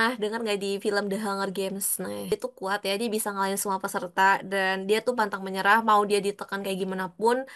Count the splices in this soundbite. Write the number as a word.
one